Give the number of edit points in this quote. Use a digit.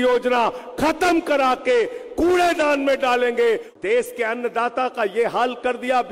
1